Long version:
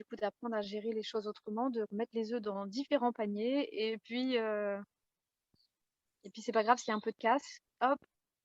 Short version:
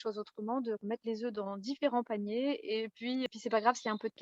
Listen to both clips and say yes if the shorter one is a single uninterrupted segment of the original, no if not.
no